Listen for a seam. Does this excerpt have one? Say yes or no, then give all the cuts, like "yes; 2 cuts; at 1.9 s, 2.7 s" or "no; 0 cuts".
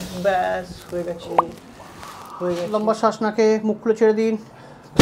yes; 1 cut; at 2.7 s